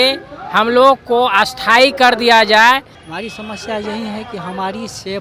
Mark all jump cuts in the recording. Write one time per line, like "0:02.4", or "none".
0:03.0

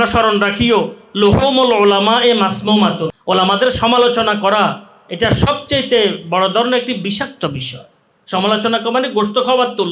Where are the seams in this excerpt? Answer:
0:03.1

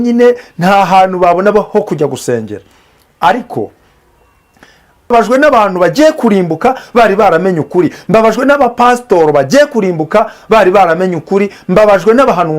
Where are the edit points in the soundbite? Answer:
0:05.1

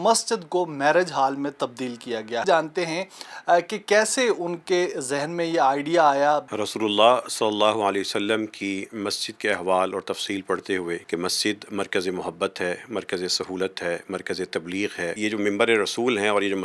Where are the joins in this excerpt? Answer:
0:02.4
0:06.5
0:11.0
0:15.1

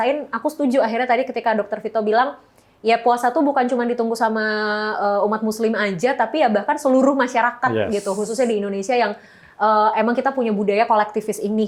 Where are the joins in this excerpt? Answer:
none

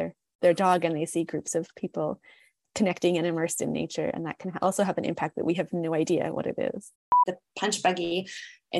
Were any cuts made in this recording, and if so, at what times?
0:07.3

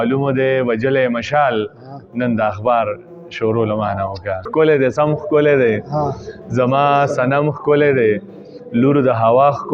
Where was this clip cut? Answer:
0:04.5

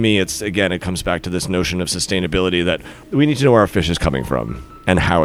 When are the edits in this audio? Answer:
none

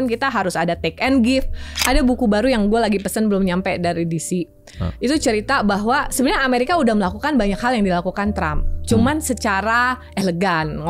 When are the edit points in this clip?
0:01.8

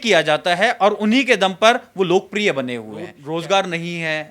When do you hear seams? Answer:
0:03.2

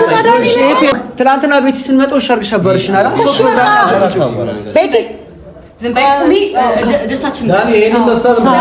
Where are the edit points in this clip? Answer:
0:00.9

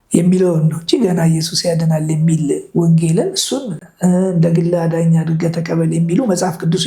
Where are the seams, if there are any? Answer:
none

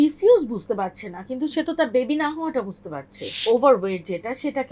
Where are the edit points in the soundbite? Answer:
0:03.3

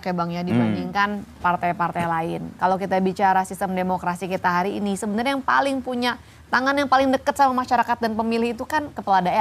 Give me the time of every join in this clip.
none

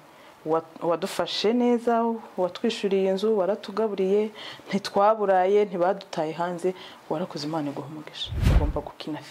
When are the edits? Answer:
0:08.4

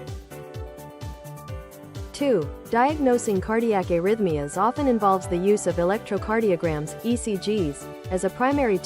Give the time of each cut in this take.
0:02.2

